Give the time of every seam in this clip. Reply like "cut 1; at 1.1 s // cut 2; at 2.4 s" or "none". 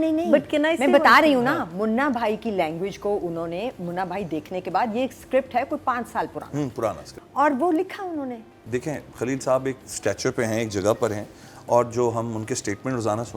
cut 1; at 7.1 s // cut 2; at 8.6 s